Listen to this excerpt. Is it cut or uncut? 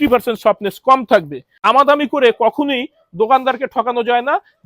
cut